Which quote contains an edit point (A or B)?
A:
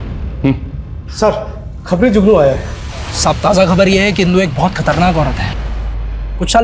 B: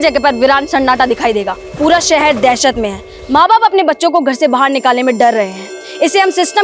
B